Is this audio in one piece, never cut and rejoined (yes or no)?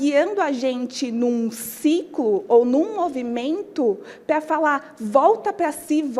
yes